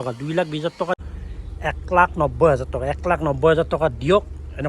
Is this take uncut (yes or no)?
no